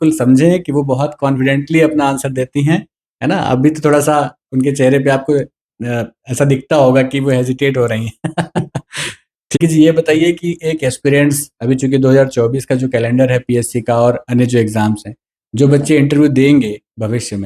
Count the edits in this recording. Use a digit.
1